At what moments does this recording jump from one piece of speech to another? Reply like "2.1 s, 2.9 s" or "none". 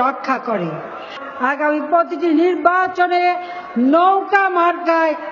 1.2 s